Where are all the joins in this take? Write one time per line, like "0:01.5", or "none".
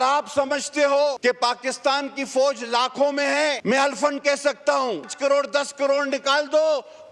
0:01.2
0:03.6
0:05.1

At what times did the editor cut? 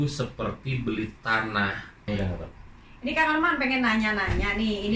0:02.1

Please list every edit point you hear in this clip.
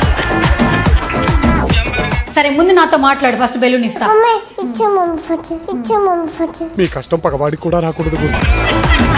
0:02.2

